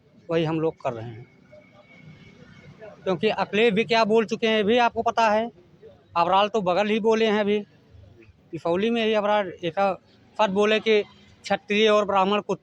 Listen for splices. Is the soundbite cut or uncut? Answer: uncut